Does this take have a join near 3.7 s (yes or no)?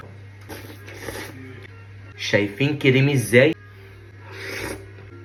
no